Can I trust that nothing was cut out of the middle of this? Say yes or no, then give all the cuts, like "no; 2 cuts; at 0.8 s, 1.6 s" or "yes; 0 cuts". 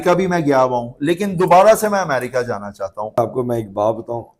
no; 1 cut; at 3.2 s